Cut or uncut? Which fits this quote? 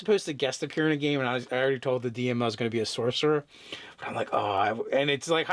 cut